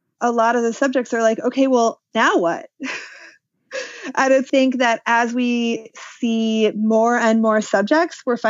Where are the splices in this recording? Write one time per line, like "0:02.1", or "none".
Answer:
0:04.5